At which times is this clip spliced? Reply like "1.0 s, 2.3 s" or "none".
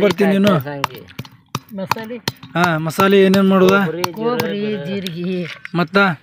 none